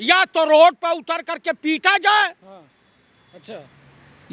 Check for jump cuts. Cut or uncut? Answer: uncut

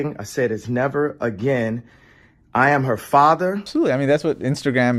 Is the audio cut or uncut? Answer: cut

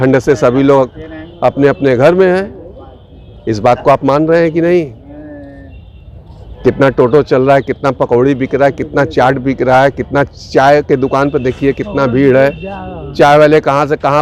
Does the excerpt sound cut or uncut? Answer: uncut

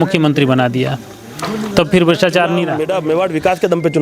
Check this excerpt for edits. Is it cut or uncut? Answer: cut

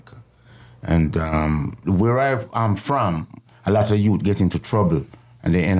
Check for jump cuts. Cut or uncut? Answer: cut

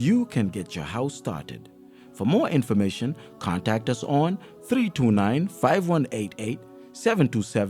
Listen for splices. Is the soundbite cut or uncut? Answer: uncut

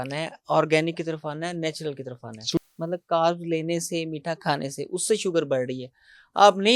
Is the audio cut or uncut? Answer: cut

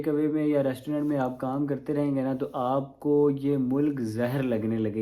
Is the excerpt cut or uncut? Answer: uncut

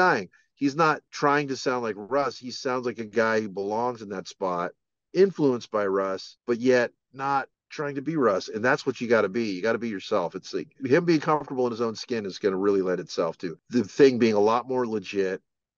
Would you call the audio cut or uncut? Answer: cut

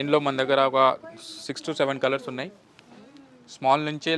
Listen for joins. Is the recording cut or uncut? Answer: uncut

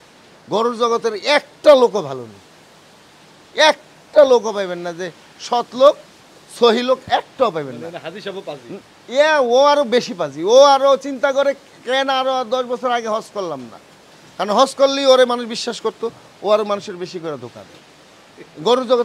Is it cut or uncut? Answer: uncut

